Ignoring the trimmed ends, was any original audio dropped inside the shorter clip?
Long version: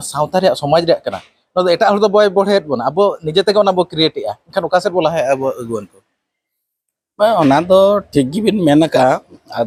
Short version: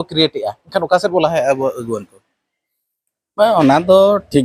no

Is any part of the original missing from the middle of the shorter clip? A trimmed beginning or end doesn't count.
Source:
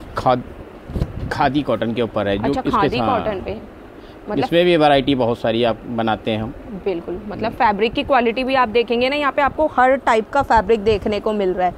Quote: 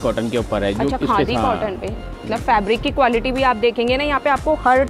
yes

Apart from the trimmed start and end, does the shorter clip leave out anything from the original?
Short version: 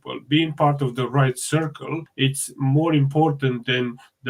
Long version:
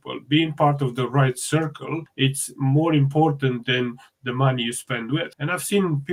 no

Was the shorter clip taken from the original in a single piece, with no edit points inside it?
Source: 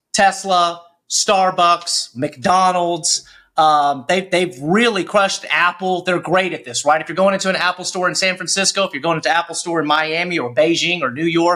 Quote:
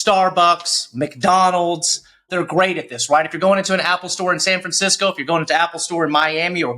no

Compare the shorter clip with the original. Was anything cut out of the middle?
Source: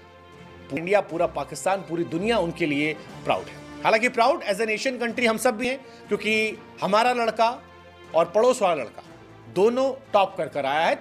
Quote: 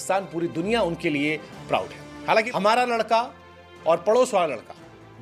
yes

